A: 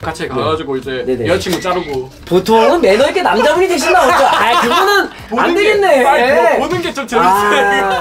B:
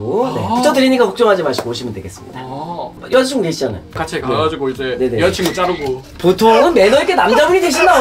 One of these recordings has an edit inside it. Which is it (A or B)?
B